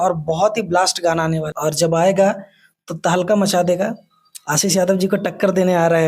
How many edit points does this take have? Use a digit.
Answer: 1